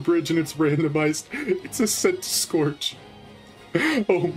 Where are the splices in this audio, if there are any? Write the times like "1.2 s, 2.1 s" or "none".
none